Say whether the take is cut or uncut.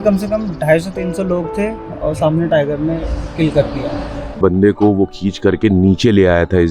cut